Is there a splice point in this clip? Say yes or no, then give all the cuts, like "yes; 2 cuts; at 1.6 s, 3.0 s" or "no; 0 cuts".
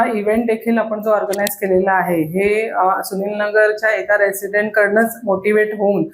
no; 0 cuts